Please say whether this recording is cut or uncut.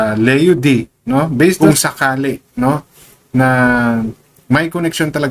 cut